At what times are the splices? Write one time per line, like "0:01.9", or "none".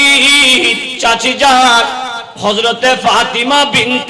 0:02.3